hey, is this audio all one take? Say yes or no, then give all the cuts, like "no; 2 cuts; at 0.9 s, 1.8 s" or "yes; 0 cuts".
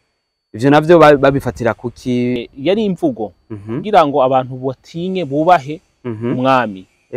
no; 1 cut; at 2.4 s